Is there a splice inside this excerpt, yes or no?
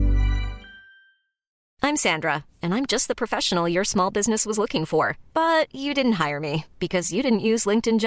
yes